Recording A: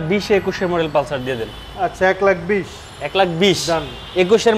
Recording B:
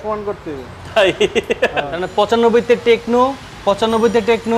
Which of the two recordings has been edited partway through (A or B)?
B